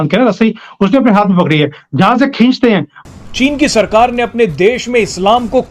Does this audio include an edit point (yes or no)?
yes